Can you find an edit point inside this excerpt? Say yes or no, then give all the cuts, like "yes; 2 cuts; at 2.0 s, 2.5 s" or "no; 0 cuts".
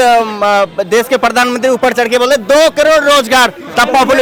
no; 0 cuts